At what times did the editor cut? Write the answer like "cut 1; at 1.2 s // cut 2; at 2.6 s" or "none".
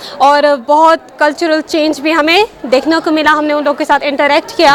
none